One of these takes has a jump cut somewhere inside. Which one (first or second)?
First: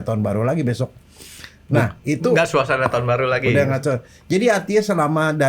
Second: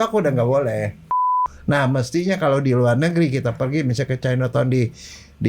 second